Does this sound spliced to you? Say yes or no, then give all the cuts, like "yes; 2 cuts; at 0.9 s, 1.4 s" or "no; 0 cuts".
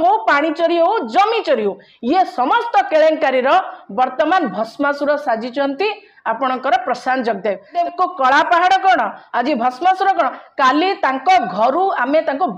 yes; 1 cut; at 7.7 s